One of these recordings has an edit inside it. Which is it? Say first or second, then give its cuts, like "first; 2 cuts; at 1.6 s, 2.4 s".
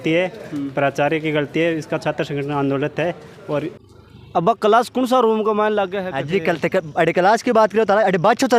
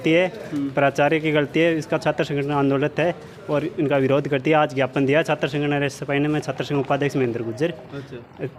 first; 1 cut; at 3.7 s